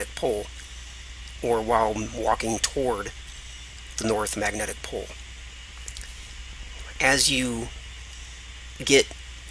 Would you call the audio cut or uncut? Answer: cut